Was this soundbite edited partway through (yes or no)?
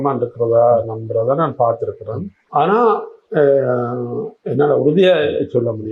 no